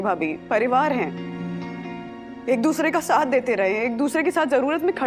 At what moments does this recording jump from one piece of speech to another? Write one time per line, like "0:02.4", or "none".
none